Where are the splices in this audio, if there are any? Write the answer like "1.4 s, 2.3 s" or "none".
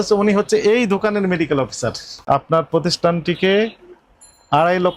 2.2 s